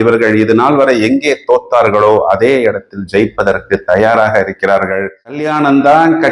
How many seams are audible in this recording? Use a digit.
1